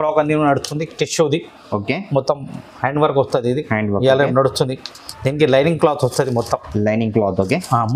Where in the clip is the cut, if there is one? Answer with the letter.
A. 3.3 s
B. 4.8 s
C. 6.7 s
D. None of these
D